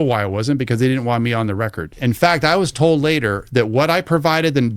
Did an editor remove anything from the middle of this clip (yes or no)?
yes